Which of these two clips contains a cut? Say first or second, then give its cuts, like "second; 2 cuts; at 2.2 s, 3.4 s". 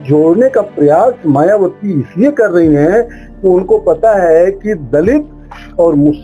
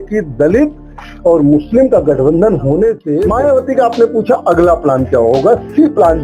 second; 1 cut; at 3.1 s